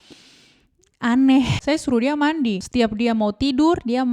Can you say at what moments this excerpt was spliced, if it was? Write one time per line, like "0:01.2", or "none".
0:01.6
0:02.6